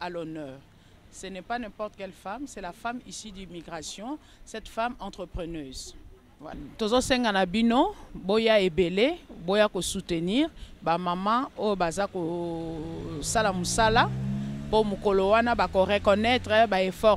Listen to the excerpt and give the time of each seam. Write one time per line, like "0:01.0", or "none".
0:06.7

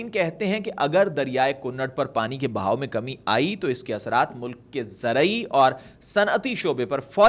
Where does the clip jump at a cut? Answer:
none

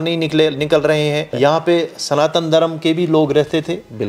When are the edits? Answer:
0:01.3

